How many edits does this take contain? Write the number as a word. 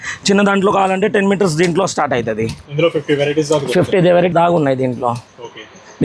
two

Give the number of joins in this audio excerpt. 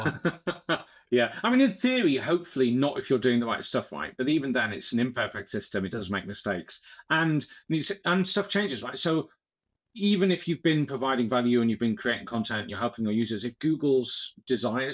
zero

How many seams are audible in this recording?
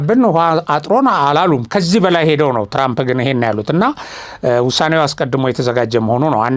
zero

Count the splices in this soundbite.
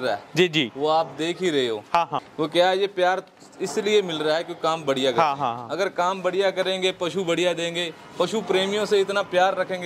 one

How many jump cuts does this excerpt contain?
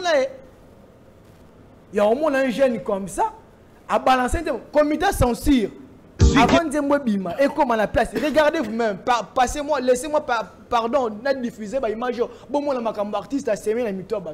zero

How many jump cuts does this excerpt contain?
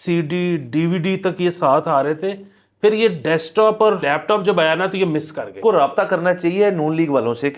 two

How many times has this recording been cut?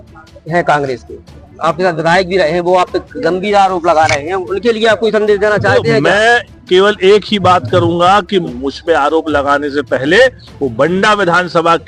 one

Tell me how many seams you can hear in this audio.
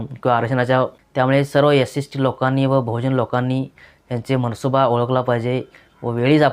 one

